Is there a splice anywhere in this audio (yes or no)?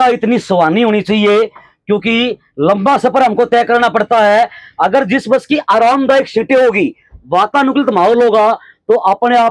no